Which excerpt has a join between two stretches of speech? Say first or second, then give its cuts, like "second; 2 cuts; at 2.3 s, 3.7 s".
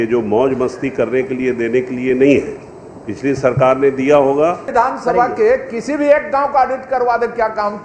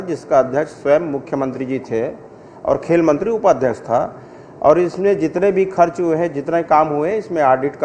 first; 1 cut; at 4.7 s